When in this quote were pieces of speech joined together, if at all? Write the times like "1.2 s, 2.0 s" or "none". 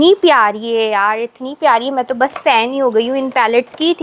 none